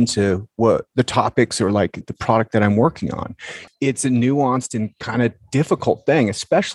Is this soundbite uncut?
no; 3 cuts; at 0.9 s, 2.0 s, 3.6 s

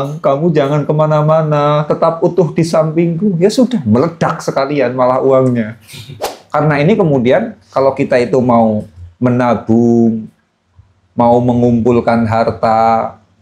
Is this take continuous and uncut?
no; 1 cut; at 6.4 s

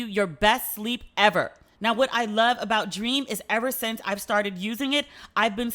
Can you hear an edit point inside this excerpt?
yes; 1 cut; at 1.6 s

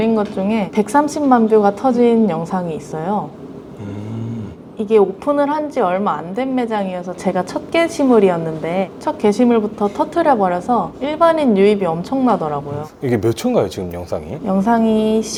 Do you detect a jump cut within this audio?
no; 0 cuts

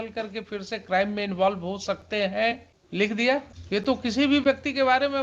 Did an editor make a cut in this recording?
yes; 2 cuts; at 2.7 s, 3.6 s

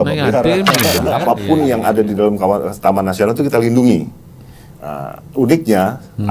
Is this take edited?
yes; 1 cut; at 1.0 s

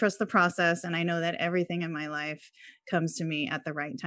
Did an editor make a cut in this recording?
no; 0 cuts

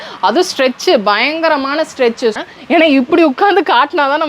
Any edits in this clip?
yes; 1 cut; at 2.4 s

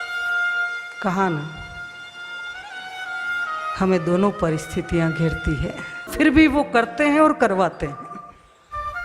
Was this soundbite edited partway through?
yes; 1 cut; at 6.1 s

